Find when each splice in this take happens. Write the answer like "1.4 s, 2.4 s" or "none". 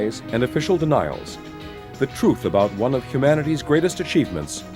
none

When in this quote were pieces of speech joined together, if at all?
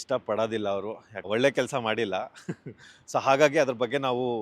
1.1 s

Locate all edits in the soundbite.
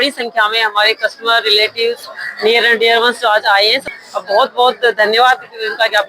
3.9 s

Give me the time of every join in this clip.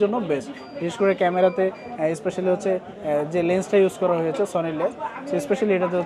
none

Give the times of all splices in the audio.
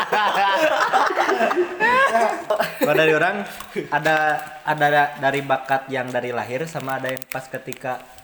2.5 s

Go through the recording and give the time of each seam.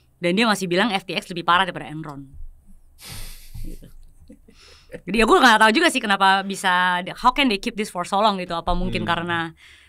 none

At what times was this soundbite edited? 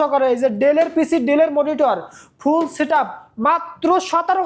none

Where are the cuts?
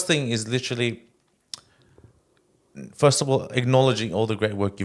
none

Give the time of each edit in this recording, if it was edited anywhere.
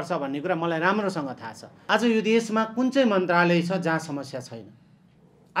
1.7 s

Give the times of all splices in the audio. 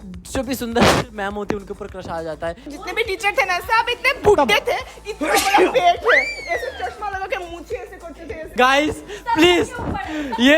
2.7 s, 8.5 s

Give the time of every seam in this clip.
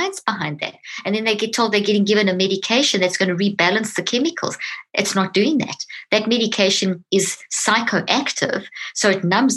7.0 s

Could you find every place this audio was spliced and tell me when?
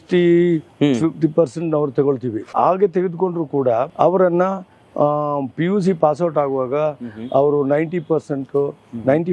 2.5 s, 3.9 s

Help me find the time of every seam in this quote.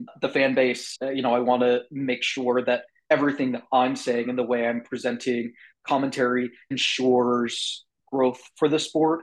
none

